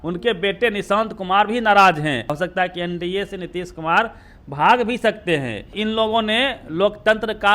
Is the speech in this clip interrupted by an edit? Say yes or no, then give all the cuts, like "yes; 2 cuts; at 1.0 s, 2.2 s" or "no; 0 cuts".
yes; 2 cuts; at 2.4 s, 5.7 s